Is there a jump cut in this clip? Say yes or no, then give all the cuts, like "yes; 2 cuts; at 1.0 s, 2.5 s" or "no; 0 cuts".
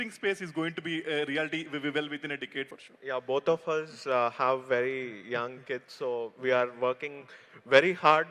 yes; 1 cut; at 2.8 s